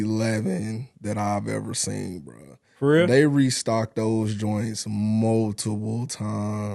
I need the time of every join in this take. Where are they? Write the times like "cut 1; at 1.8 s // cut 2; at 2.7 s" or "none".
none